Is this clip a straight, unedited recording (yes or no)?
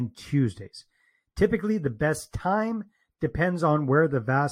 yes